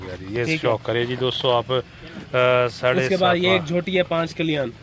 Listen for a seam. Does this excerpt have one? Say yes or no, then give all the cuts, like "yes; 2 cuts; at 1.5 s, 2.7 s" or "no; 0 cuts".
no; 0 cuts